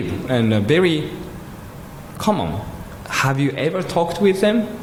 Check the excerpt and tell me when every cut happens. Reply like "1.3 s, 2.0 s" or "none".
none